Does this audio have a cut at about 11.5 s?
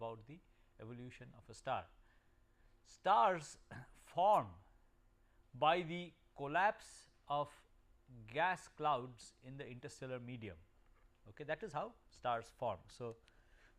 no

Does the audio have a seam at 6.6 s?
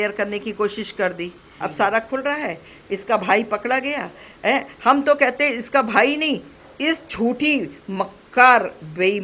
no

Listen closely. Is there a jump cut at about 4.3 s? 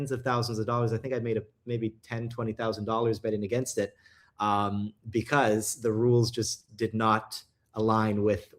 no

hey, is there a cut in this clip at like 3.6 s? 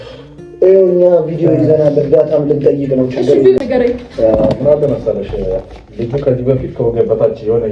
yes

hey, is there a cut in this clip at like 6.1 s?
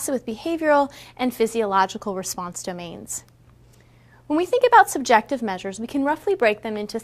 no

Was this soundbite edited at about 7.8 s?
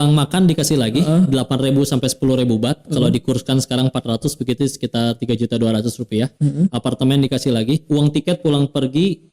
no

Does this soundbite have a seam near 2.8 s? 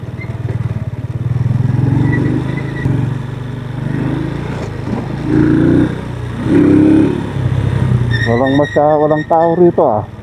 yes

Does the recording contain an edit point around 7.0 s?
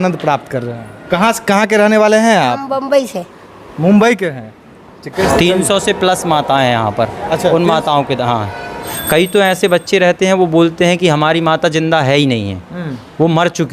no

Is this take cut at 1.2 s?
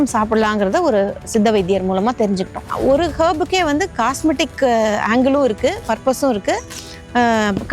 no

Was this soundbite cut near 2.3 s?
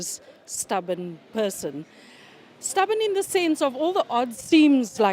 no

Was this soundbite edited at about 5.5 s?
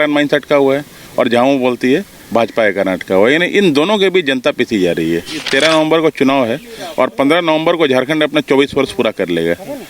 yes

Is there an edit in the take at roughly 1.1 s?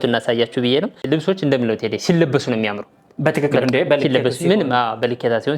yes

